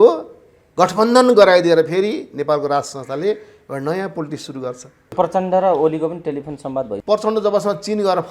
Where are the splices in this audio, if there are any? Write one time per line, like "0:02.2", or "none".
0:05.2
0:07.0